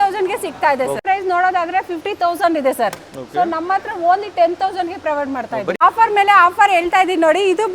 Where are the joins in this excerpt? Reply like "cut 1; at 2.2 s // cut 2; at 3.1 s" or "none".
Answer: cut 1; at 1.0 s // cut 2; at 5.7 s